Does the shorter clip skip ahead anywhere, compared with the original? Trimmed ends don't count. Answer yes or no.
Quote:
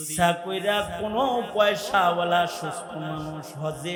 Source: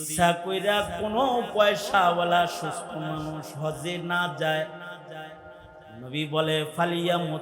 no